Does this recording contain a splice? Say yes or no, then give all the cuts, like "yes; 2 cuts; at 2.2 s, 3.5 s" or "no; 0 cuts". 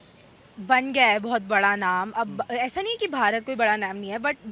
no; 0 cuts